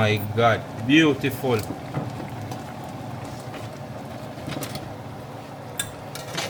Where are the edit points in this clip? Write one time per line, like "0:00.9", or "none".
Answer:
none